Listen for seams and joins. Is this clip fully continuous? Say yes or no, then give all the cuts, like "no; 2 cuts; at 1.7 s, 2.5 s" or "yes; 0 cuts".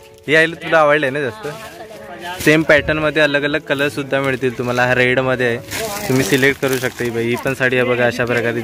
no; 2 cuts; at 2.3 s, 5.7 s